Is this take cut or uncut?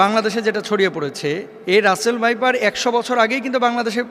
cut